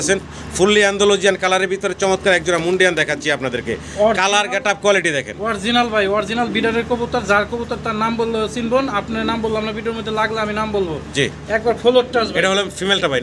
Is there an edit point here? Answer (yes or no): no